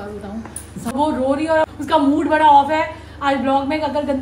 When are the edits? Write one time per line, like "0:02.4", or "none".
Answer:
0:00.9
0:01.7

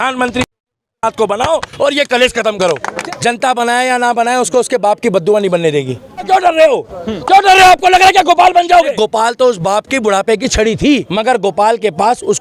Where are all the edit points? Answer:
0:02.9
0:06.3
0:08.9
0:11.1

